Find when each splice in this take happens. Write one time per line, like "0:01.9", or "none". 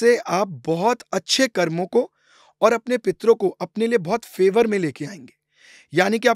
none